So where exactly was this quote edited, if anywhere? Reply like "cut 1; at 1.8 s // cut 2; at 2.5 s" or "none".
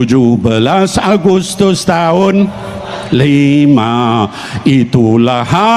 none